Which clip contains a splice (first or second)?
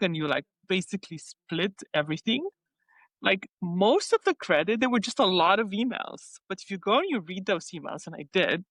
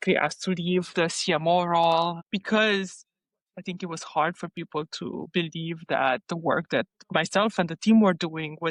second